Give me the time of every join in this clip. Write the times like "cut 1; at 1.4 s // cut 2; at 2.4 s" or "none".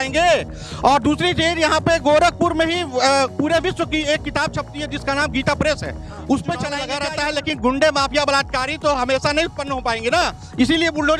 cut 1; at 6.8 s